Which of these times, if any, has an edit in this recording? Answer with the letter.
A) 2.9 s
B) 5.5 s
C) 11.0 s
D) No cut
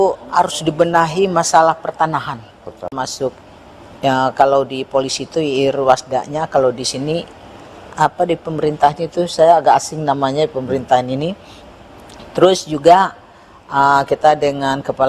A